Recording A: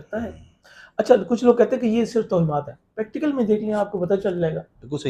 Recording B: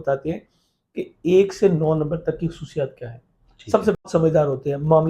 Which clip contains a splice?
B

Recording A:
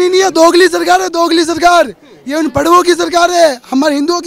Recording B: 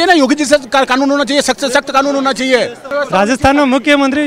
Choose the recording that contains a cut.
B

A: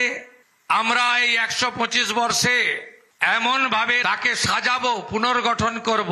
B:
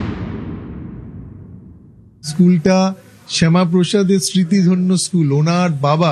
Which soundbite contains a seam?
B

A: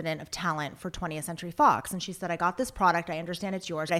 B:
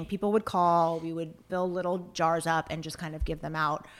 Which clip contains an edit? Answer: B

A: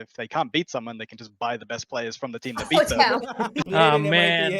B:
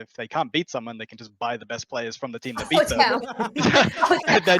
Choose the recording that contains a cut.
A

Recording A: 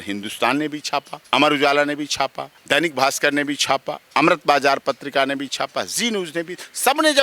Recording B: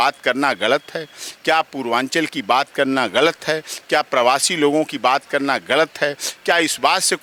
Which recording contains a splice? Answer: A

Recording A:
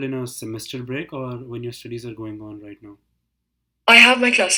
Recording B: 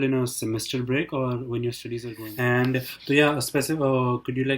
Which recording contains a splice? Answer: B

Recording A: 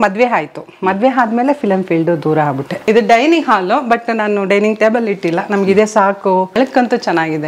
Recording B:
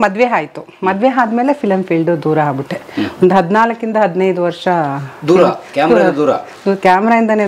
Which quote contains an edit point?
A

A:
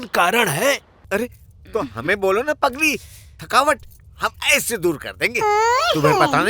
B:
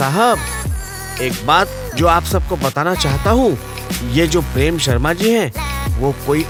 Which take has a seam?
A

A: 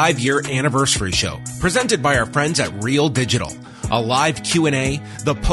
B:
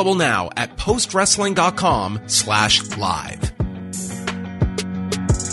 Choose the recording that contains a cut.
B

